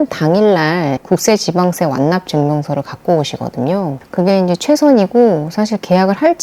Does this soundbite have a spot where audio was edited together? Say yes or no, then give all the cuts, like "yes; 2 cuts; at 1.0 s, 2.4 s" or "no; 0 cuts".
no; 0 cuts